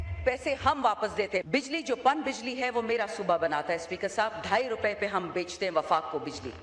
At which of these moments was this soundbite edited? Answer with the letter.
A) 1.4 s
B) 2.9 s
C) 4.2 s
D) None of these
A